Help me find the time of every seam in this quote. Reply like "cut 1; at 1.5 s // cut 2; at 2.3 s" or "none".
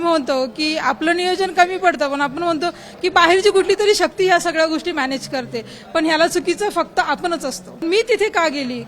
cut 1; at 7.8 s